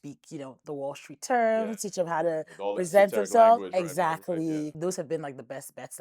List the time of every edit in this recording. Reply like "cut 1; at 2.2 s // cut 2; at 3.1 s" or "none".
cut 1; at 4.7 s